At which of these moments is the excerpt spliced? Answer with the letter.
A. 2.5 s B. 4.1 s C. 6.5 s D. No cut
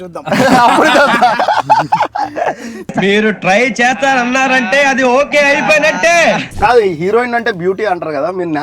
C